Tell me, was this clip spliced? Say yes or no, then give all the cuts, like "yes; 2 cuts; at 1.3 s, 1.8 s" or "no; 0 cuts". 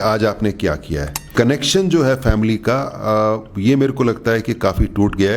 yes; 1 cut; at 1.3 s